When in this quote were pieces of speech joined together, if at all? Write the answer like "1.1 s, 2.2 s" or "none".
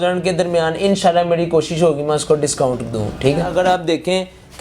3.5 s